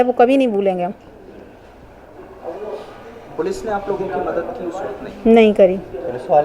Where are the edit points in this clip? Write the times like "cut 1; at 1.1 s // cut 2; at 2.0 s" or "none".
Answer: none